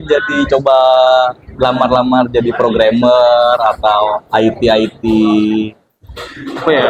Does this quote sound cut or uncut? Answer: uncut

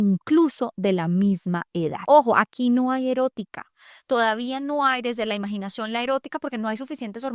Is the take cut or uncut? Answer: cut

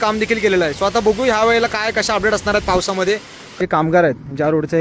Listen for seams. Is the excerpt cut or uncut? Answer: cut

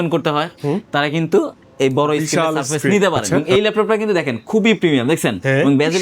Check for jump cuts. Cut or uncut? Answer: cut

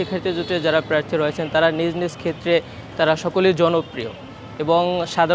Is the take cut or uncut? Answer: uncut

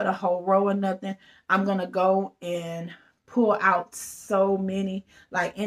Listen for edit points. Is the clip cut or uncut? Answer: uncut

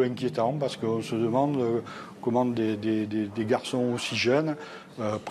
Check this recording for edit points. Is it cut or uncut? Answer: uncut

